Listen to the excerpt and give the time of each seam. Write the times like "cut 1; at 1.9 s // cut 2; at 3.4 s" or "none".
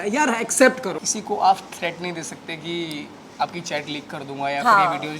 cut 1; at 0.9 s